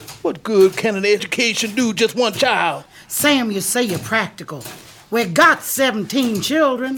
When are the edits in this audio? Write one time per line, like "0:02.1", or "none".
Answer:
0:01.3
0:02.9